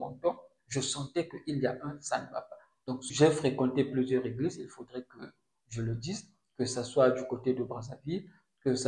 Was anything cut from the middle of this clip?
yes; 1 cut; at 3.0 s

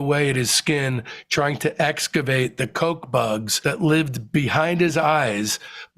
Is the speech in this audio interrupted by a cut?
yes; 1 cut; at 3.5 s

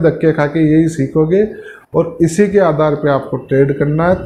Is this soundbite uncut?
yes; 0 cuts

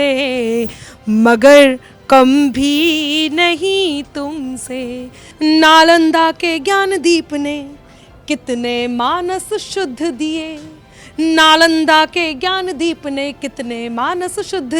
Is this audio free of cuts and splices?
no; 1 cut; at 5.2 s

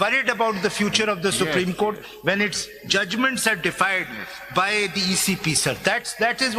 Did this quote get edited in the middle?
no; 0 cuts

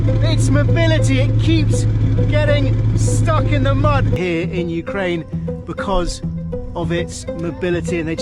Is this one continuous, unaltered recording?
no; 1 cut; at 4.1 s

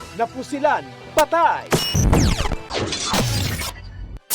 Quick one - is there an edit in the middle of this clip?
yes; 2 cuts; at 1.6 s, 2.7 s

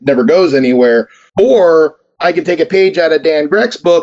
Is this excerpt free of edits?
no; 2 cuts; at 1.2 s, 2.1 s

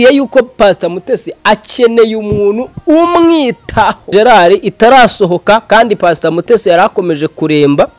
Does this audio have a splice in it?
yes; 1 cut; at 4.0 s

